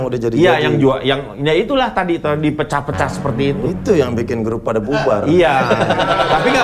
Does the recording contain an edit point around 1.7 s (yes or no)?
no